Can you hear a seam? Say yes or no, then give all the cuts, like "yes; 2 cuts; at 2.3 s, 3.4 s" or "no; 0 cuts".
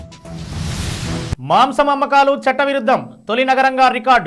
yes; 1 cut; at 1.3 s